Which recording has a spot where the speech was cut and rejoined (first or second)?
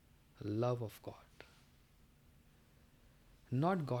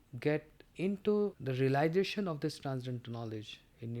second